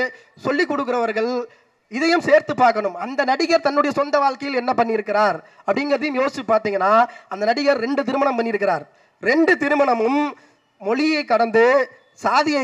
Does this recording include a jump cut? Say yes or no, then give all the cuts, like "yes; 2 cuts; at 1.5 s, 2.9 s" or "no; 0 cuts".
no; 0 cuts